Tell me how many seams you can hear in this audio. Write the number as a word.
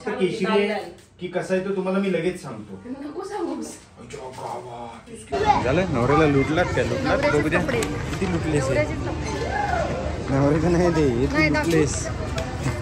one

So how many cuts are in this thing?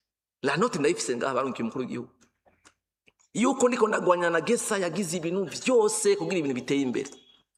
zero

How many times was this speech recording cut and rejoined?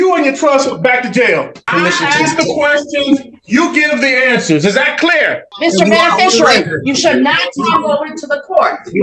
two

